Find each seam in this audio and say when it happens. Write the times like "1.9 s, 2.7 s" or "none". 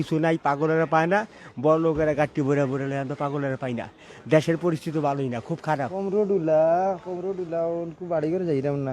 5.9 s